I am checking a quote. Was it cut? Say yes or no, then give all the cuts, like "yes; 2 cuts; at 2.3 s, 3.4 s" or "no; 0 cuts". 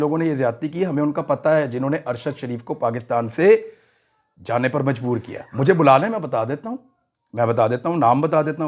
yes; 1 cut; at 5.4 s